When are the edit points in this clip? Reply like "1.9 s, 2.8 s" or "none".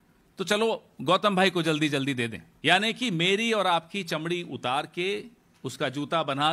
2.5 s